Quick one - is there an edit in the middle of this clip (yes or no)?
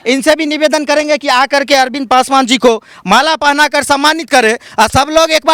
no